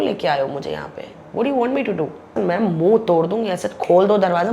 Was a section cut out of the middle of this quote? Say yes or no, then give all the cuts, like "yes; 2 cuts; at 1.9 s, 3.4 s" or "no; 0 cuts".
yes; 1 cut; at 2.3 s